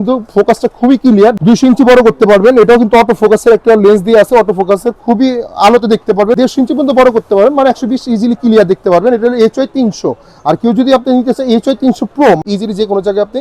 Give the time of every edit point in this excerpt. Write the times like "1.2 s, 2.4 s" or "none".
1.4 s, 6.4 s, 12.4 s